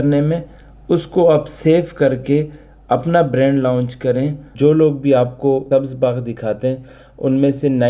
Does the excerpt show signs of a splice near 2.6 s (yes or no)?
no